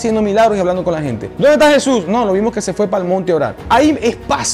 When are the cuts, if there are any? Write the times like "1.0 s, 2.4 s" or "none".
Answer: 1.2 s, 3.6 s